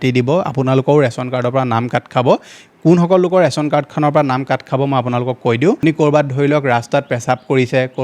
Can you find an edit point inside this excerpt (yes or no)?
yes